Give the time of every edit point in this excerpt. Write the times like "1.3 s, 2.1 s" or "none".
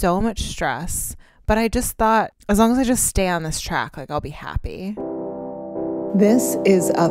2.4 s, 5.0 s